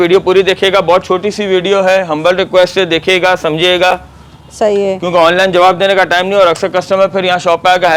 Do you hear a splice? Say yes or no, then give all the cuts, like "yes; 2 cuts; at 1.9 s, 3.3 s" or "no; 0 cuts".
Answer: no; 0 cuts